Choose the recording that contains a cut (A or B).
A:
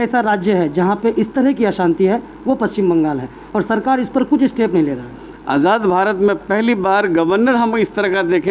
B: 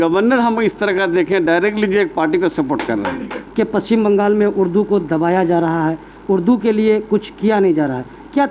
B